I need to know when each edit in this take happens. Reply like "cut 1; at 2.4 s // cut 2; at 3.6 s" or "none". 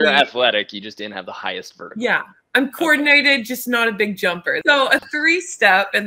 cut 1; at 4.6 s